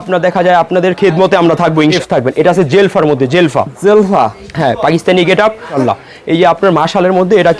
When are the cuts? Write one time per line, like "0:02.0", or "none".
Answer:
0:02.0
0:05.7